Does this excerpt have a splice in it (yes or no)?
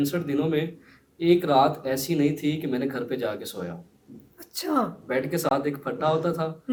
no